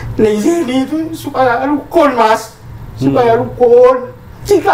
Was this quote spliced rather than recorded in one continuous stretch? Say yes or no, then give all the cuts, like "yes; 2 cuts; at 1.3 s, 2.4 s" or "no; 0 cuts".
no; 0 cuts